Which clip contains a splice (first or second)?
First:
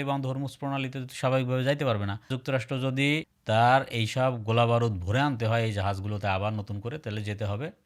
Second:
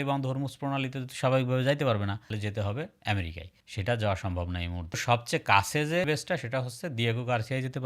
second